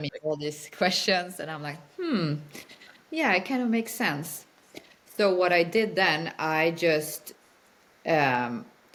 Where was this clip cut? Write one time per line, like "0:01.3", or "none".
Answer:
none